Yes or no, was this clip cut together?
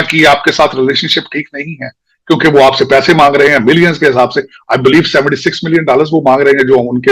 no